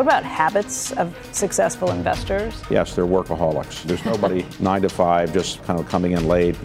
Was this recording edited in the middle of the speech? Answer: yes; 3 cuts; at 2.5 s, 4.1 s, 5.6 s

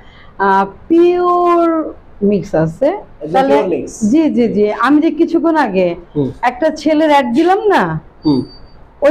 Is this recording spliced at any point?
yes; 1 cut; at 3.1 s

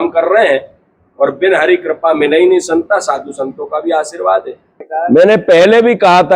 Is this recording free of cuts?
no; 1 cut; at 5.1 s

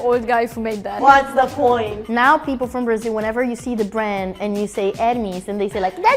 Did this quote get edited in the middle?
yes; 2 cuts; at 0.9 s, 2.0 s

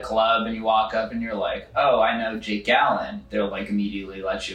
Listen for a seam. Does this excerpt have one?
no; 0 cuts

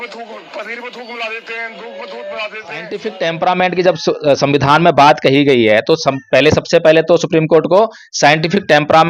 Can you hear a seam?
yes; 1 cut; at 3.1 s

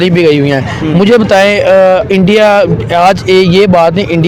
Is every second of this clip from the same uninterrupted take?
yes; 0 cuts

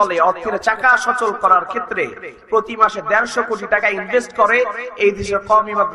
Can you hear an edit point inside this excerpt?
no; 0 cuts

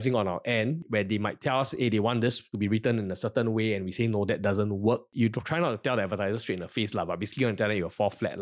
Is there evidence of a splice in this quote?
no; 0 cuts

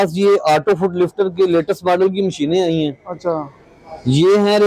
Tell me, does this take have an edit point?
no; 0 cuts

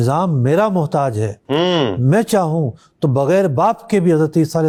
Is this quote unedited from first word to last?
yes; 0 cuts

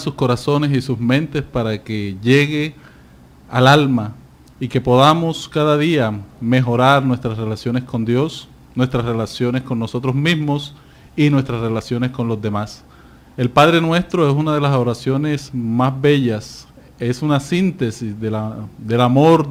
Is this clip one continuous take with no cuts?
yes; 0 cuts

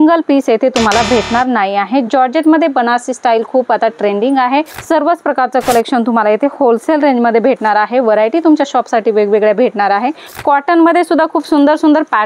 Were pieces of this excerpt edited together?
yes; 2 cuts; at 4.8 s, 10.3 s

